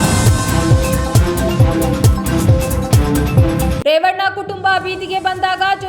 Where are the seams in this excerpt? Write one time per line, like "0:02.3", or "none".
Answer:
0:02.1
0:03.8